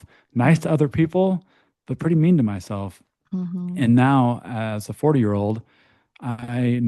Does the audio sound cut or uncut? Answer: uncut